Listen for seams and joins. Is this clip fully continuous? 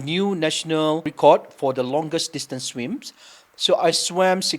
no; 1 cut; at 1.1 s

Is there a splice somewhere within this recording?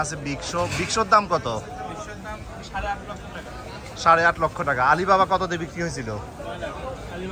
no; 0 cuts

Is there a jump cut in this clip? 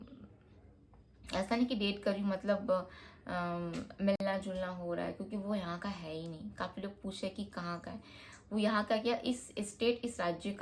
no; 0 cuts

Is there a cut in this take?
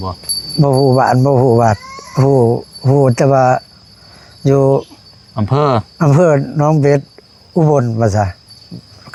no; 0 cuts

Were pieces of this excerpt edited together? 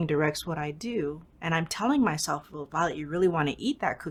no; 0 cuts

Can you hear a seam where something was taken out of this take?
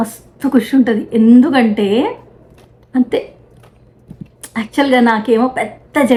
no; 0 cuts

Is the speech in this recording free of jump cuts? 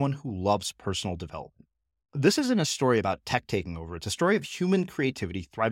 yes; 0 cuts

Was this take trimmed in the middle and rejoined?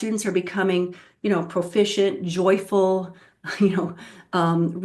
no; 0 cuts

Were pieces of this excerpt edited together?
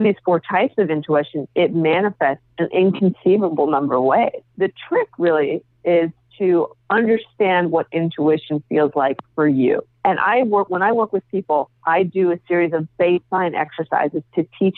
no; 0 cuts

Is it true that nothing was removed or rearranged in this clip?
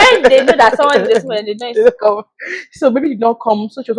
yes; 0 cuts

